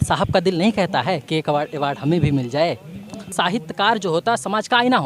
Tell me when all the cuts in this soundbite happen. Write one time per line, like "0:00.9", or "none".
0:03.3